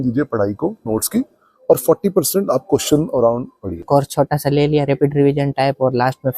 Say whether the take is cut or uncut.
cut